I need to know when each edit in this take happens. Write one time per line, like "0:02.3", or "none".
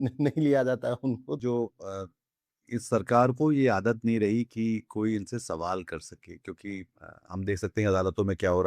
0:01.4